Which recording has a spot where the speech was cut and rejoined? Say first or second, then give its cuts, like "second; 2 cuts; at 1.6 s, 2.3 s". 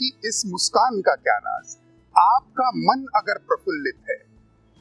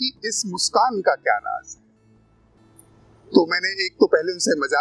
first; 1 cut; at 2.1 s